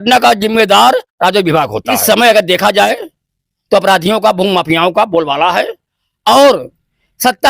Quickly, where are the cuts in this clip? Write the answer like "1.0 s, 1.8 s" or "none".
2.0 s